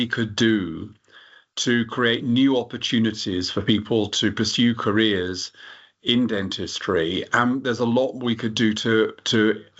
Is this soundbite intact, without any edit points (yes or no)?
yes